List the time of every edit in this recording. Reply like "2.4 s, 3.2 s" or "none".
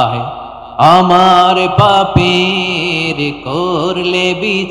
none